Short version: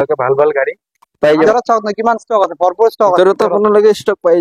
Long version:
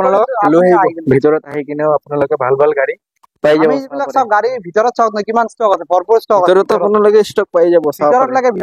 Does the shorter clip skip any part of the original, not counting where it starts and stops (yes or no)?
yes